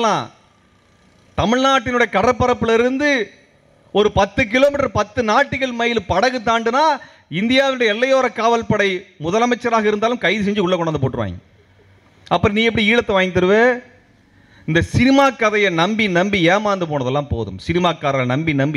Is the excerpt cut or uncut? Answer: uncut